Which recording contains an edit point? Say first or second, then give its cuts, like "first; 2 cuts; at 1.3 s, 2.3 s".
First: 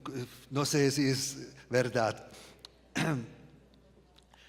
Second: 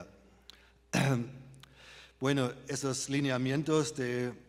first; 1 cut; at 3.1 s